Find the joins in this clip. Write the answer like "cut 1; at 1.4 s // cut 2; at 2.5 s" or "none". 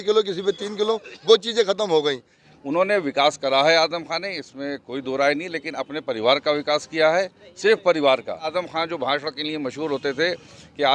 cut 1; at 2.3 s // cut 2; at 8.5 s